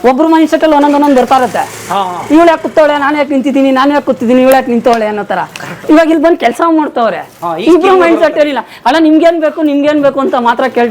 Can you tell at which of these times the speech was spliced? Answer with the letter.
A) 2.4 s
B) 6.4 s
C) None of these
C